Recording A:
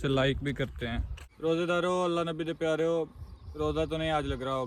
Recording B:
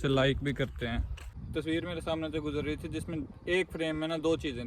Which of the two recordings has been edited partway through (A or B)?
B